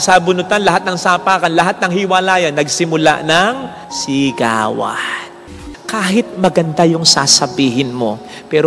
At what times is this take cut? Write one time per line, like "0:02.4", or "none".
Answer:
0:05.5